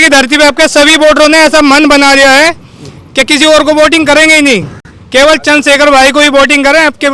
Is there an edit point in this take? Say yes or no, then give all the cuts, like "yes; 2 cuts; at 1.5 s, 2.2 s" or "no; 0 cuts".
no; 0 cuts